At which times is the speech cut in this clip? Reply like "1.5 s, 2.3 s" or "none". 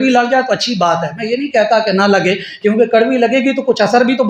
none